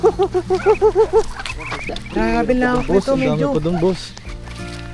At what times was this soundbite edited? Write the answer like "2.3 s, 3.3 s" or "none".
2.0 s